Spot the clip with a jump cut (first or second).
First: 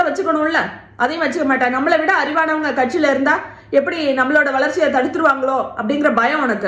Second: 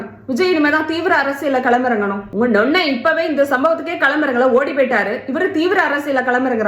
second